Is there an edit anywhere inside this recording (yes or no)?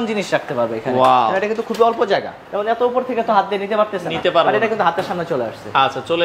yes